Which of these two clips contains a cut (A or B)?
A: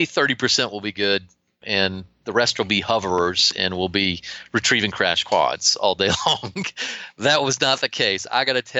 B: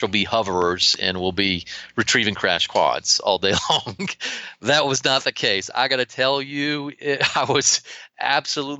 A